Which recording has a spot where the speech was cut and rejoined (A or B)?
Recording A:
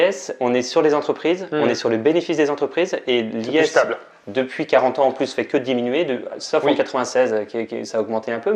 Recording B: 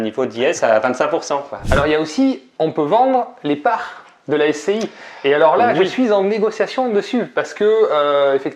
B